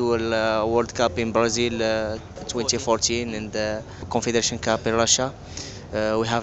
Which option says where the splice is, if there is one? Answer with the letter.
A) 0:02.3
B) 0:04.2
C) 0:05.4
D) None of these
A